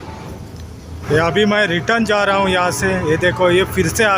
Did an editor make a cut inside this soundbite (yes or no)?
yes